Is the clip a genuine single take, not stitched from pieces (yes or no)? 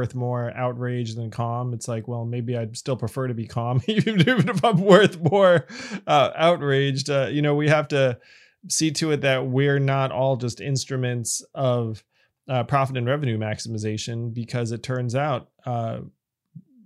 yes